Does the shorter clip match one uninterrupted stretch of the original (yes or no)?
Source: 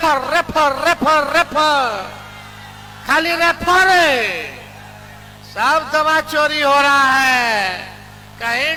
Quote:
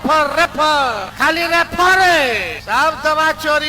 no